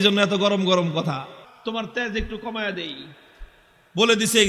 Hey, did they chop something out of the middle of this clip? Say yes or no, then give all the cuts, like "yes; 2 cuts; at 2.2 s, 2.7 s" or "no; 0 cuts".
yes; 1 cut; at 1.4 s